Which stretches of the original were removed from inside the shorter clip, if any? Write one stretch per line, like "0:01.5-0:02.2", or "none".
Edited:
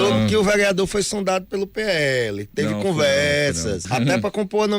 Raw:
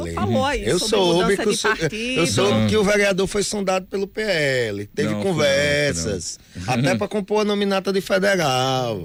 0:06.2-0:06.6